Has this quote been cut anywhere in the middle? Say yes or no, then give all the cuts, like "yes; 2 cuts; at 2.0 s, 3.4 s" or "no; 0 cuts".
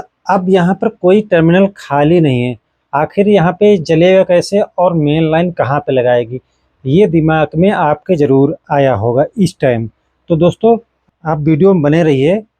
yes; 1 cut; at 10.9 s